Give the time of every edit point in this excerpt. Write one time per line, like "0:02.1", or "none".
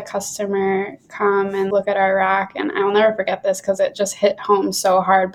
0:01.7